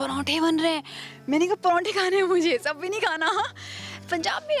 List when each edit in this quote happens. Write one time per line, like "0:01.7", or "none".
none